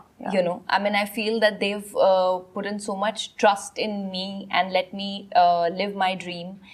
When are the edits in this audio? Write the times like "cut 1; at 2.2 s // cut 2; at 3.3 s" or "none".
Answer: none